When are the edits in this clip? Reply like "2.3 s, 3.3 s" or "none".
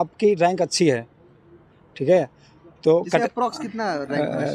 none